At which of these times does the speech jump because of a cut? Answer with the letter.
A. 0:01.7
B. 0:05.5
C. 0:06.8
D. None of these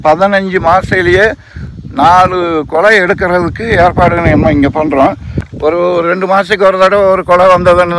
B